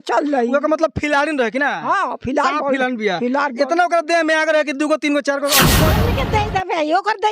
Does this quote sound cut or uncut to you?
cut